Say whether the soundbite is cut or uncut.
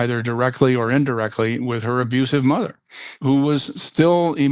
cut